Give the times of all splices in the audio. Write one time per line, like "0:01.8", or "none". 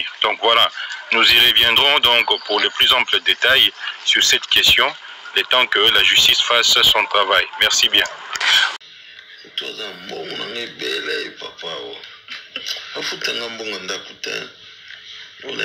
0:08.7